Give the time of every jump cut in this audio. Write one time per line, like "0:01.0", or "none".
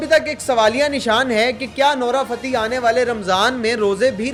none